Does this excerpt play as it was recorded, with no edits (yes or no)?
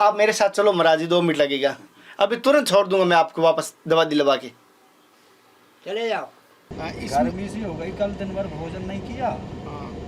no